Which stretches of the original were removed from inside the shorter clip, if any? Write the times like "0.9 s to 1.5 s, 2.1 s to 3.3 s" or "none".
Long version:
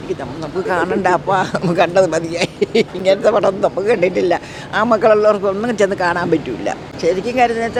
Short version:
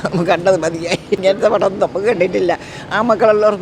2.6 s to 2.9 s